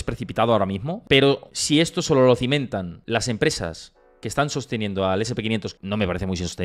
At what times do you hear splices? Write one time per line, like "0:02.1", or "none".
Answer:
0:00.9
0:01.5
0:03.0
0:05.7